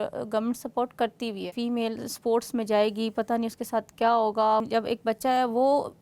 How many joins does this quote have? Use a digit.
2